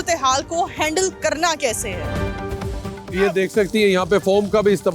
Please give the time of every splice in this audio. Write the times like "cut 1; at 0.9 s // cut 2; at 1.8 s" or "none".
none